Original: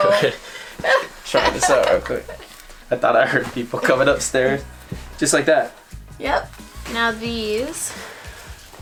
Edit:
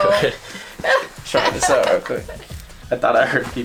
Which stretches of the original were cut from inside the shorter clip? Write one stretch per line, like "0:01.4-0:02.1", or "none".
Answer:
none